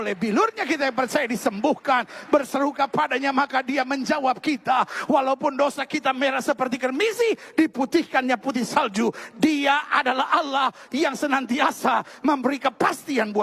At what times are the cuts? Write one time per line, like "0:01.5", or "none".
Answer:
0:09.2